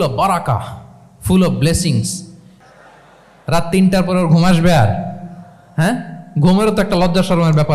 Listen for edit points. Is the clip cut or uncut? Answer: cut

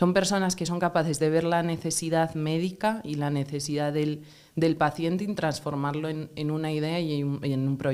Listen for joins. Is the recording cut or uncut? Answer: uncut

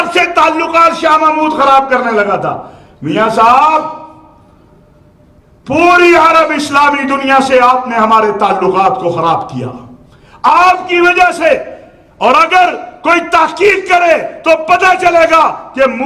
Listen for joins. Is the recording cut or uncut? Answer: uncut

